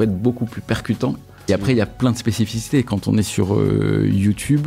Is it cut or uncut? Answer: cut